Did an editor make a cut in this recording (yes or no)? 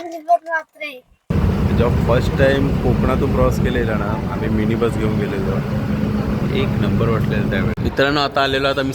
yes